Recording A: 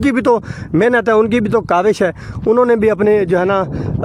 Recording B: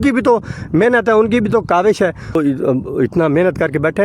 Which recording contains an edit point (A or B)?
B